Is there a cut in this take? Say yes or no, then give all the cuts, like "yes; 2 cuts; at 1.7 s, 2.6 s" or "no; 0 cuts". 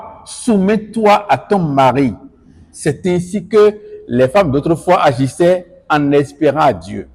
no; 0 cuts